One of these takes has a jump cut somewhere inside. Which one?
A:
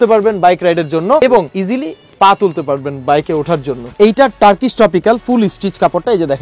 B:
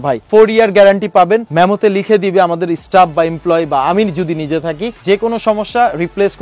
A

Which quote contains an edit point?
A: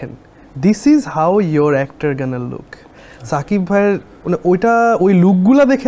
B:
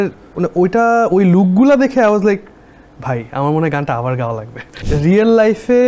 B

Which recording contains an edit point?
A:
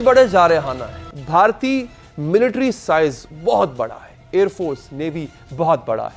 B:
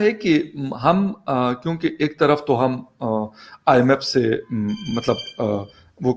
A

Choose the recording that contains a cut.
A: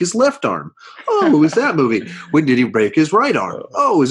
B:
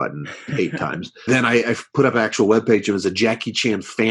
B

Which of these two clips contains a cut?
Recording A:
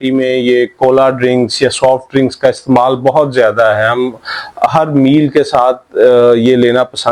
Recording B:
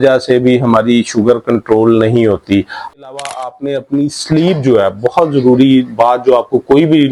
B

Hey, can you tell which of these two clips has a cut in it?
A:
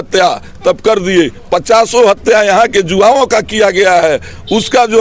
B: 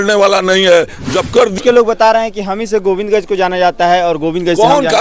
B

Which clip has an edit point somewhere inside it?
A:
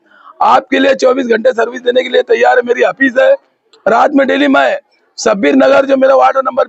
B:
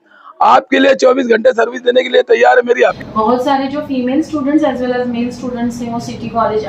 B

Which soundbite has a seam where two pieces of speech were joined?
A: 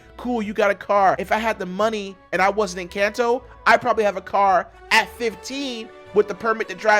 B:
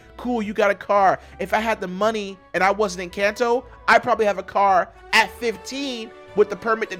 A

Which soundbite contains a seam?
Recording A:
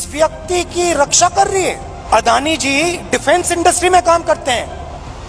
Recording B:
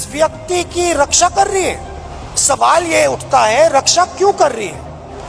A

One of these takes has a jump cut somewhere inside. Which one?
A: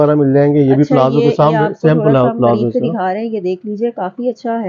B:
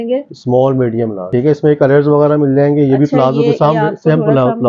B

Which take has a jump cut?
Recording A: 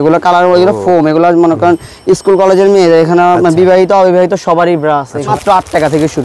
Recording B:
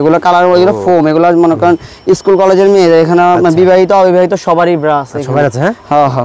A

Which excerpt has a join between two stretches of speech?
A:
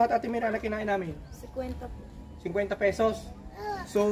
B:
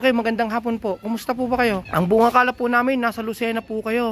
B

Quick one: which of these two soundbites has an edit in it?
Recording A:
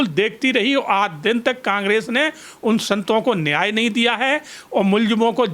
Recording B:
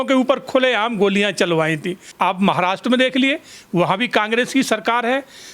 B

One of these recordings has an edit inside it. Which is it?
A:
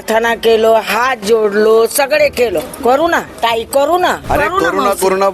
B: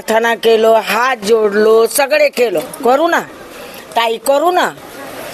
A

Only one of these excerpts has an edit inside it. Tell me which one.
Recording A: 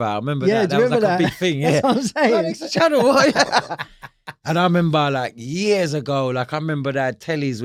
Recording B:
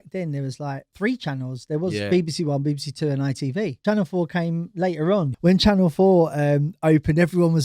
B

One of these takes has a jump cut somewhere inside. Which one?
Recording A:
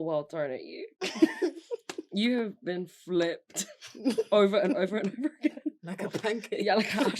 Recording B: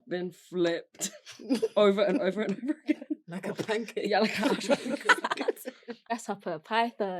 B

